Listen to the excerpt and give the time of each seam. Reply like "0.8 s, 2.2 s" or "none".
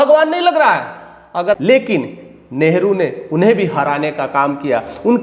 1.6 s